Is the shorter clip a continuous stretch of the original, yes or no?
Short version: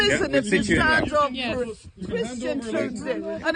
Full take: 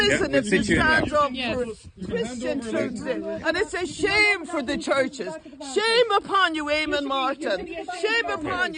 yes